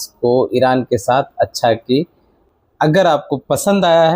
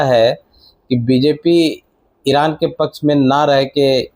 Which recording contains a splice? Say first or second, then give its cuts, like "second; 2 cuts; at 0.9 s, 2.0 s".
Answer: first; 1 cut; at 2.4 s